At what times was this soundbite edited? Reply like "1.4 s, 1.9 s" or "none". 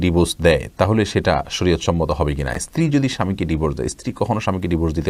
none